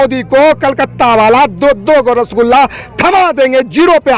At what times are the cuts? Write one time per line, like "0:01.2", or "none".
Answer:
none